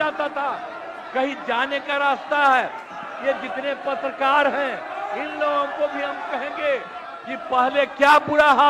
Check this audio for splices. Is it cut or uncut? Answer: uncut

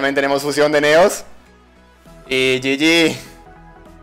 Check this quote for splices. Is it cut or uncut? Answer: uncut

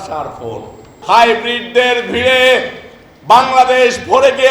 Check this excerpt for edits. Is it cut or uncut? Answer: cut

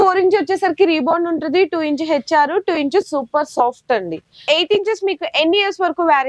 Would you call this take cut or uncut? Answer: cut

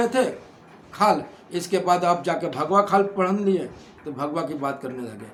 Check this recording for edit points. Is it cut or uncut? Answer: uncut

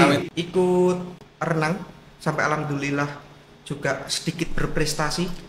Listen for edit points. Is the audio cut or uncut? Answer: uncut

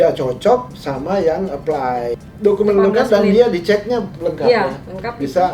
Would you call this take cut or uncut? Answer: cut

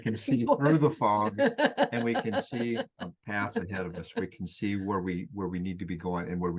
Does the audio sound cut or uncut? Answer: uncut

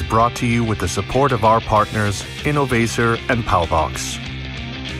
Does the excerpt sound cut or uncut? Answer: cut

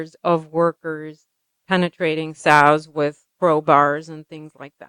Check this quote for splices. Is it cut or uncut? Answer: uncut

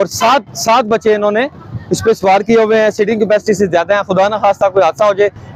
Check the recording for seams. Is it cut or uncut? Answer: uncut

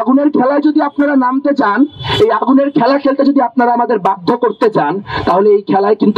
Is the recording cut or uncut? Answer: uncut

